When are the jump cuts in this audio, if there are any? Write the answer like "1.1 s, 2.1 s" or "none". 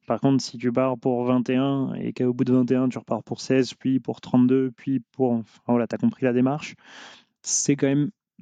none